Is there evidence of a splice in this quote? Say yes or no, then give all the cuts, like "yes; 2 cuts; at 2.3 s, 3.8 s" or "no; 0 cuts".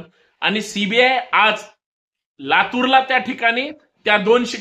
yes; 1 cut; at 2.3 s